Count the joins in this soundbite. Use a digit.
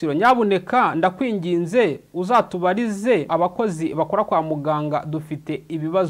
1